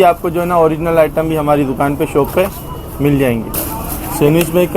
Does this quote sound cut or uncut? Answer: cut